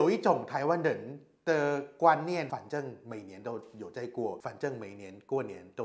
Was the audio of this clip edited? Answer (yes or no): no